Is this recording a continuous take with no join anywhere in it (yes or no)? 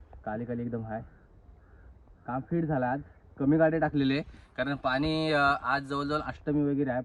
yes